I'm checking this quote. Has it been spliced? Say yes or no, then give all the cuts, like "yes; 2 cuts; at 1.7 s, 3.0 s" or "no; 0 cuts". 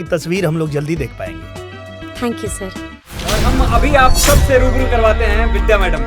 yes; 1 cut; at 3.3 s